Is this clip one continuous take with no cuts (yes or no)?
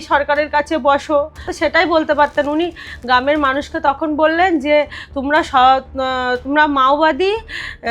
no